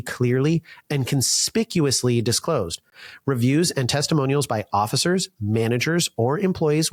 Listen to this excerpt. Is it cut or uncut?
uncut